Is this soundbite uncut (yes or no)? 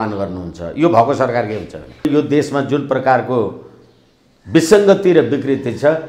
no